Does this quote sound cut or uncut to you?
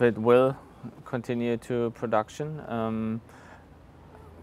uncut